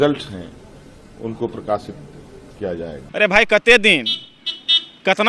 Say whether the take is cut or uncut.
cut